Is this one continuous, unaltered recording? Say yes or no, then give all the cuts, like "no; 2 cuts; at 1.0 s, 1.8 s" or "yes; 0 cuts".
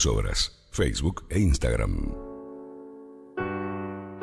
yes; 0 cuts